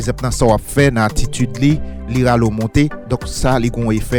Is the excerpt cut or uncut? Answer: uncut